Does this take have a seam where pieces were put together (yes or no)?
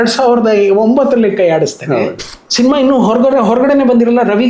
yes